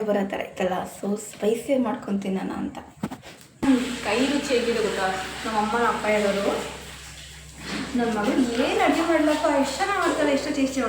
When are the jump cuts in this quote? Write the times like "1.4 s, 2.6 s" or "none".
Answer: 3.6 s